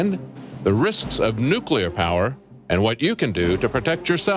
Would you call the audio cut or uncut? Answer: cut